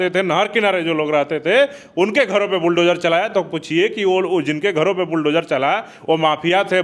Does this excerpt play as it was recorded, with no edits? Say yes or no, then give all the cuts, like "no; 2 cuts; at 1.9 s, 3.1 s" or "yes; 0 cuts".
yes; 0 cuts